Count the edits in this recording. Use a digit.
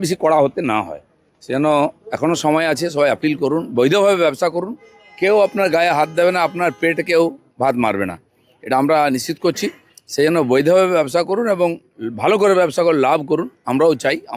0